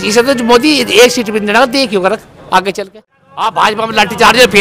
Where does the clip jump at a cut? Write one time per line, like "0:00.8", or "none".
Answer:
0:03.3